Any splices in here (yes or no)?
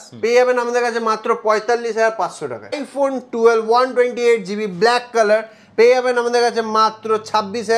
yes